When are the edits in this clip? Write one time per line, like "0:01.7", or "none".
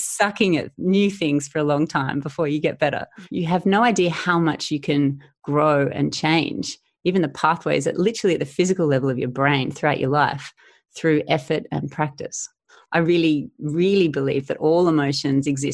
0:03.1
0:12.7